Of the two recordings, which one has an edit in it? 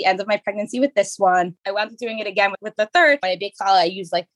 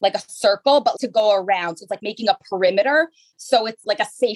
first; 2 cuts; at 1.5 s, 3.2 s

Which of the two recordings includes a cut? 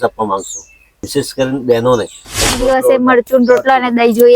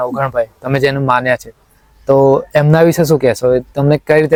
first; 2 cuts; at 1.0 s, 2.6 s

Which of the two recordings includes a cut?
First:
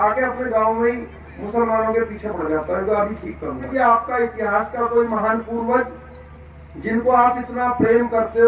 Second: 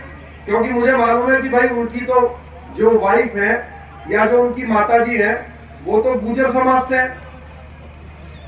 first; 1 cut; at 3.7 s

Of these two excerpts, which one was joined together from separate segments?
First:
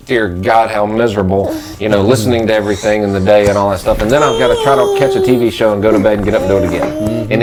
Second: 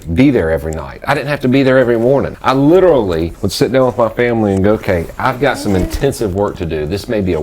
second; 2 cuts; at 2.4 s, 3.4 s

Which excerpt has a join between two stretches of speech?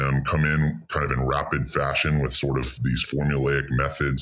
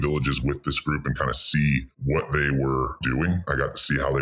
second; 2 cuts; at 1.9 s, 3.0 s

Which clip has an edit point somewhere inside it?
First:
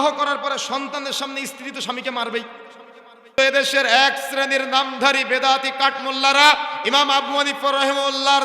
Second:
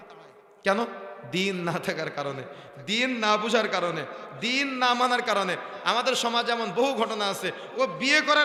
first; 1 cut; at 3.3 s

